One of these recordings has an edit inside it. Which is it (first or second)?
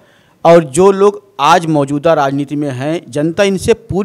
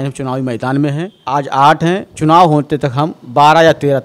second